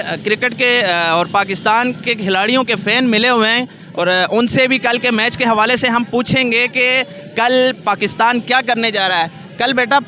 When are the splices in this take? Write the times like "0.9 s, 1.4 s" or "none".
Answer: none